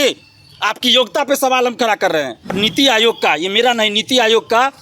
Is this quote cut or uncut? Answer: cut